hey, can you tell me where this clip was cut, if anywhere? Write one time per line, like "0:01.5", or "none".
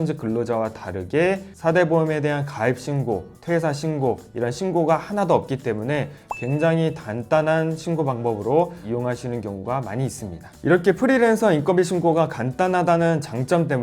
none